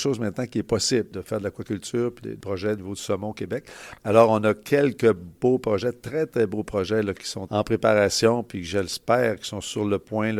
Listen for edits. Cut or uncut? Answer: uncut